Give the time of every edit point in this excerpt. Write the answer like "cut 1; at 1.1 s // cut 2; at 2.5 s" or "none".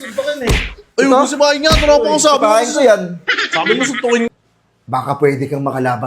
cut 1; at 4.3 s